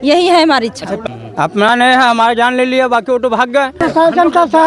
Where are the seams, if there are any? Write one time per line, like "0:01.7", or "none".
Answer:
0:01.0
0:03.7